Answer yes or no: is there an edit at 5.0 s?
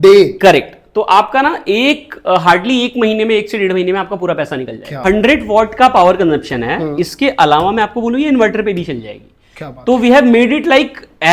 yes